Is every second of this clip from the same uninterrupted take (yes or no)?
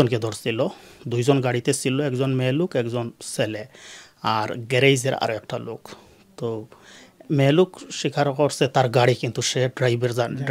yes